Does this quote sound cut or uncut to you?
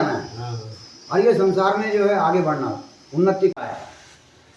cut